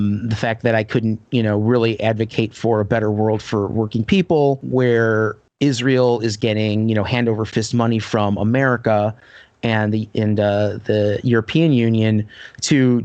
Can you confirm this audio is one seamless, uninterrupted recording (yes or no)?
no